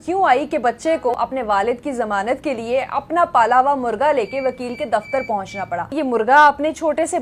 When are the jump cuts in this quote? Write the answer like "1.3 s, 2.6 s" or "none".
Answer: 1.1 s, 5.9 s